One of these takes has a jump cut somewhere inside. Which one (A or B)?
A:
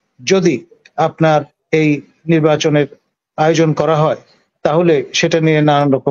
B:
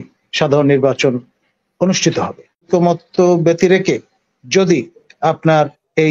B